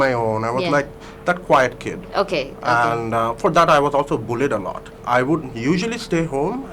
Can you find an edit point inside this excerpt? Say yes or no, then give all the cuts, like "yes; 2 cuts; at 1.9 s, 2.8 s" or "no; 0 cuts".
yes; 1 cut; at 4.9 s